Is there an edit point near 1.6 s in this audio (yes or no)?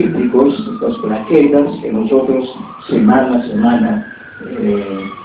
yes